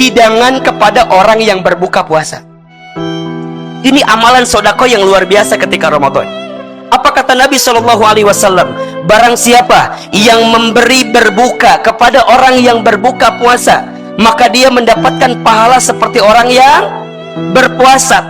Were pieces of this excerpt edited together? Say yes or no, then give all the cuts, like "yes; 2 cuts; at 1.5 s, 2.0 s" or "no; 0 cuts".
no; 0 cuts